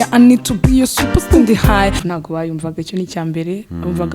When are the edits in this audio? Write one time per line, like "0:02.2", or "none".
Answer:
0:02.0

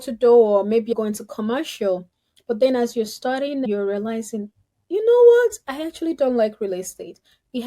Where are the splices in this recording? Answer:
0:00.9
0:03.7

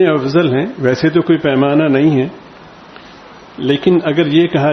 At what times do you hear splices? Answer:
none

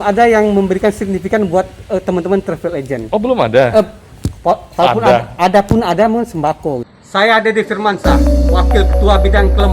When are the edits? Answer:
0:06.9

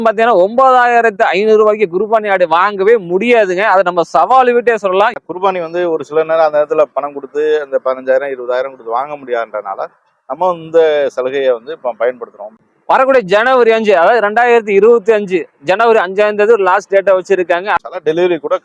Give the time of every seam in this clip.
0:05.2
0:12.4
0:17.8

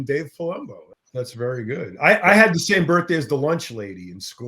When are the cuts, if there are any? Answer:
0:00.9

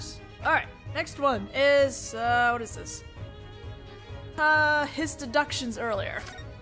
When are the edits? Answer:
0:03.2

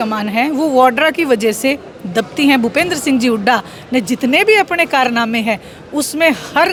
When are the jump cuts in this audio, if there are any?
none

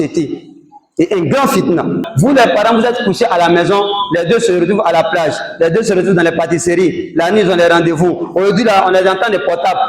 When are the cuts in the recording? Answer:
0:02.1

